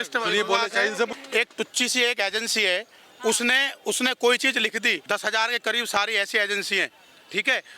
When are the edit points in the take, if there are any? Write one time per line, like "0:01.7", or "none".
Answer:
0:01.1
0:05.0